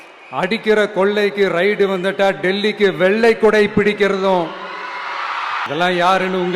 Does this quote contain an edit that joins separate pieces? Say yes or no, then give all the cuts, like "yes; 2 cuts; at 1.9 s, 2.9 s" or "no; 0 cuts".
yes; 1 cut; at 5.6 s